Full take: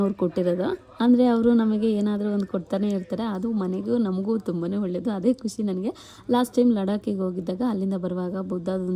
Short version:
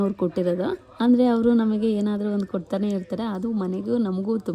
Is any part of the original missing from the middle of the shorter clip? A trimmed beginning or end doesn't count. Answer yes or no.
no